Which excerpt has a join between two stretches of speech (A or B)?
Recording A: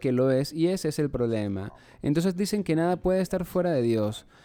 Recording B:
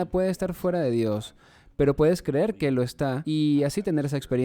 B